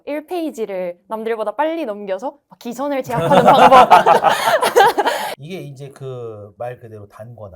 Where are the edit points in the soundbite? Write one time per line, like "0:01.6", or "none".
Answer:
0:05.3